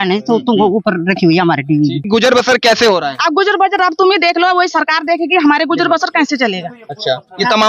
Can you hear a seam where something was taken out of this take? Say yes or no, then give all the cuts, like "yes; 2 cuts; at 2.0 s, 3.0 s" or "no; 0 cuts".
yes; 1 cut; at 2.1 s